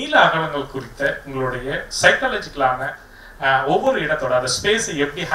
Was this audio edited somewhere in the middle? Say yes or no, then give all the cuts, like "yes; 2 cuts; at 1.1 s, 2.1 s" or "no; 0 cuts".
no; 0 cuts